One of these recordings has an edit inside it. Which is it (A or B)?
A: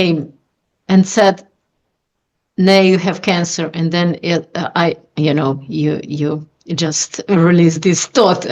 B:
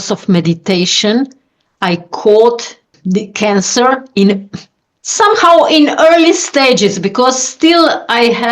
B